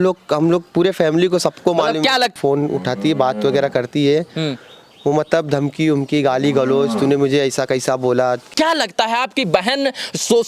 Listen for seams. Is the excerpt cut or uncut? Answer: cut